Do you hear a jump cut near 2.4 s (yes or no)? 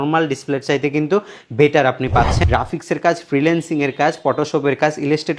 yes